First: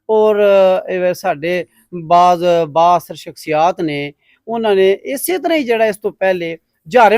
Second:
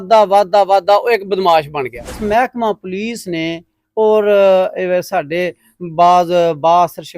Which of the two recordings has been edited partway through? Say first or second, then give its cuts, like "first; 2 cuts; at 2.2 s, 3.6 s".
second; 1 cut; at 2.2 s